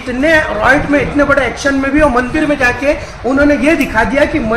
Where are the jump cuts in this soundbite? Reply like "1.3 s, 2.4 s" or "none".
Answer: none